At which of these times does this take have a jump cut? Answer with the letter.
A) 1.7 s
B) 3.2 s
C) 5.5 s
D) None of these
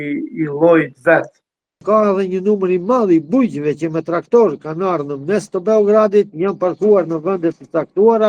A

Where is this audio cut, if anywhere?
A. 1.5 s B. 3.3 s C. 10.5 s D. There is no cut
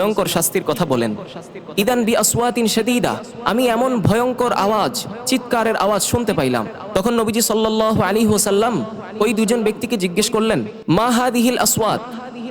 B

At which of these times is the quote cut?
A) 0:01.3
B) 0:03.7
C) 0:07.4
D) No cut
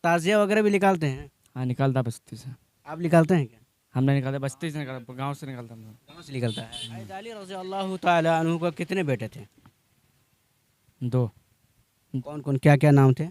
C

